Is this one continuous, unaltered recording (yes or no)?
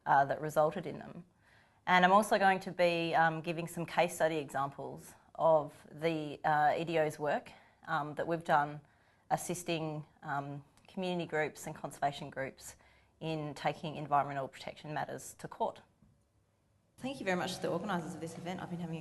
yes